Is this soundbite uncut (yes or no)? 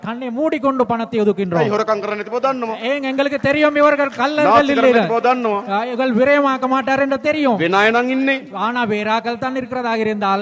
yes